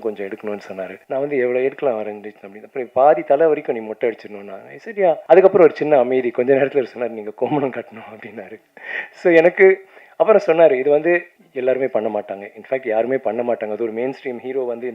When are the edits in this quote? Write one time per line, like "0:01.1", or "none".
0:01.0
0:05.2
0:11.4

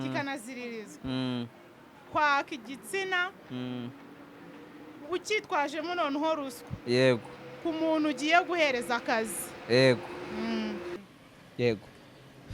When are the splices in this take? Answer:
0:11.0

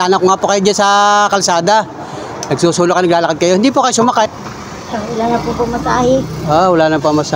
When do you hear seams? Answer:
0:04.3

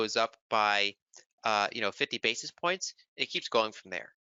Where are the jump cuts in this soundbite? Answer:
none

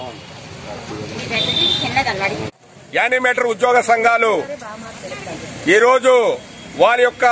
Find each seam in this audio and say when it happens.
0:02.5

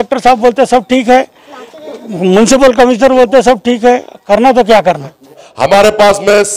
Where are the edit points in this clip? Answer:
0:05.5

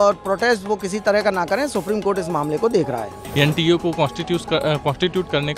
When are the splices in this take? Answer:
0:03.2

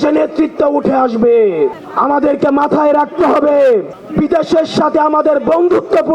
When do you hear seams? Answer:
0:01.8
0:04.0

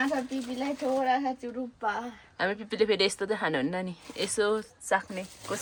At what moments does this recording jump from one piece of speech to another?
none

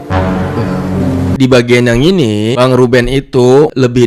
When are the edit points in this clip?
0:01.3

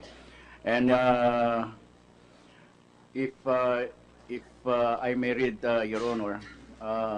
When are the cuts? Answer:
0:05.6

